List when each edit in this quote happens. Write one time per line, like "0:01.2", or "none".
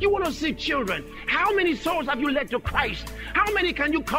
0:01.2